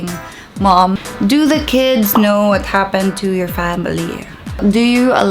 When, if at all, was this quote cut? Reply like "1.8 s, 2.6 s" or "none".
0.9 s, 4.5 s